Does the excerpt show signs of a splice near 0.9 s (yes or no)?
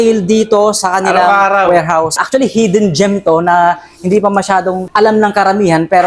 no